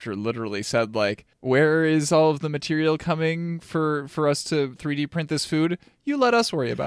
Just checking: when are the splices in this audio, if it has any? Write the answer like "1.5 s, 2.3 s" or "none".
1.3 s